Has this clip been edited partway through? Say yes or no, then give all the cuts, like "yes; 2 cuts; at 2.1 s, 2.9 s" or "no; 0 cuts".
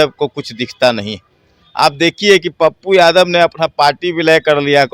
no; 0 cuts